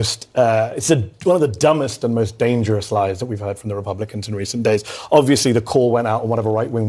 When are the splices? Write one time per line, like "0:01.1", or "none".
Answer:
none